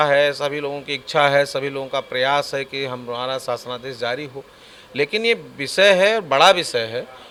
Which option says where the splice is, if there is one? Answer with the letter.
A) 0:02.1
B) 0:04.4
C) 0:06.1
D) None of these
D